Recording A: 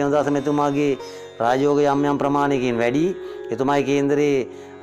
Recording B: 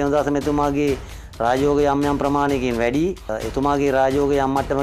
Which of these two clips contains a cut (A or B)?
B